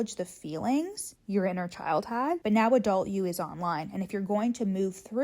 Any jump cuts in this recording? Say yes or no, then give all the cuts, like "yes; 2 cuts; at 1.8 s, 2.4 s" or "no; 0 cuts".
yes; 1 cut; at 2.4 s